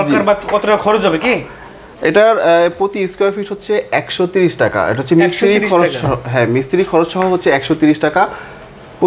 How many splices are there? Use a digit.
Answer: 0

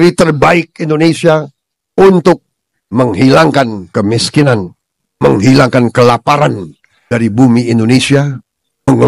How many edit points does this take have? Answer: 0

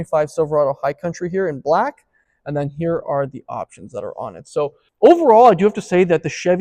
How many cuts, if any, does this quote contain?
0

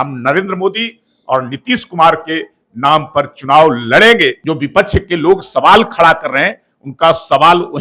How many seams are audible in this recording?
1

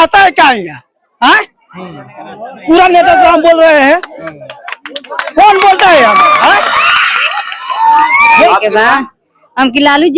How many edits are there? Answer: 1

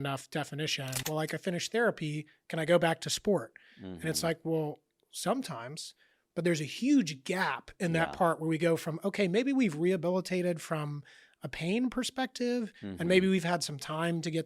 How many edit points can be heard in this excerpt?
1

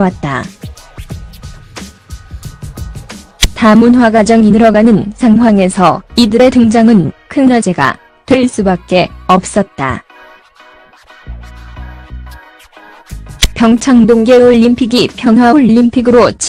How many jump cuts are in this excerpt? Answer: 0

